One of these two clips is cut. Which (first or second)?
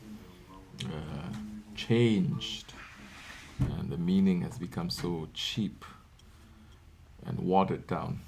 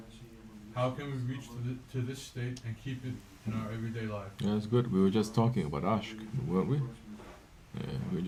first